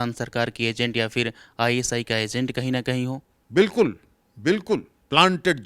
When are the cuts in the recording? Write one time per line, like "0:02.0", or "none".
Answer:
0:03.3